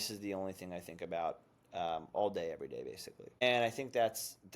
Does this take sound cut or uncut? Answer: cut